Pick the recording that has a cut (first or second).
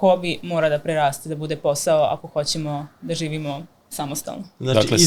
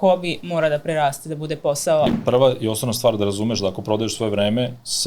second